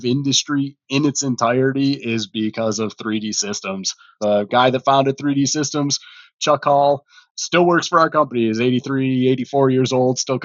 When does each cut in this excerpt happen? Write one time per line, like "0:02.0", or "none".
0:04.2